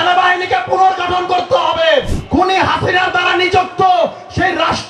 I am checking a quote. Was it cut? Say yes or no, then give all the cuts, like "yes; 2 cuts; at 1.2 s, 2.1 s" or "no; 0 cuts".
yes; 1 cut; at 2.2 s